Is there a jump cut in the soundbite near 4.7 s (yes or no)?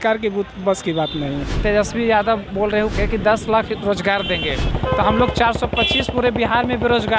yes